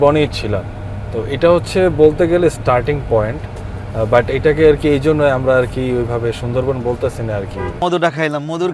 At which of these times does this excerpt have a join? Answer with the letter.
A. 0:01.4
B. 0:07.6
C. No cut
B